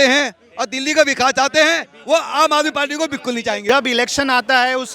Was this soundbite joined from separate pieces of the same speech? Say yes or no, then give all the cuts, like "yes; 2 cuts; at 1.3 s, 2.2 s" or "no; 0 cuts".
yes; 1 cut; at 3.6 s